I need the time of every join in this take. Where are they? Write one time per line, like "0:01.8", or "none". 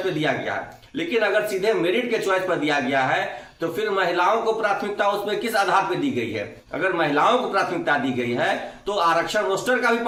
none

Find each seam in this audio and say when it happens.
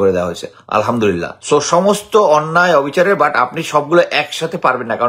0:01.3

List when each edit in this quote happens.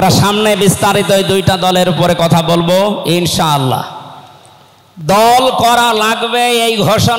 none

